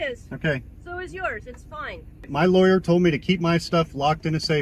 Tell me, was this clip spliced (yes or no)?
yes